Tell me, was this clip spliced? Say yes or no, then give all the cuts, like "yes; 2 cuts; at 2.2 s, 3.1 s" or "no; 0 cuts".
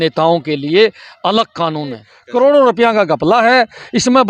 yes; 1 cut; at 2.2 s